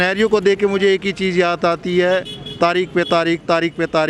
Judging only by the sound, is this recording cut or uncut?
uncut